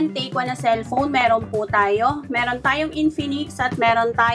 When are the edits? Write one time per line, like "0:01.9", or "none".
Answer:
none